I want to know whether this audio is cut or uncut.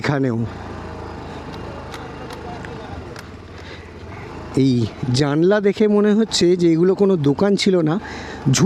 uncut